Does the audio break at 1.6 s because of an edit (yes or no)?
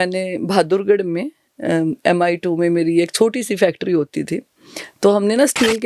no